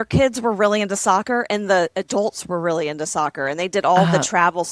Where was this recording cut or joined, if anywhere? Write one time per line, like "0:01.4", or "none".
none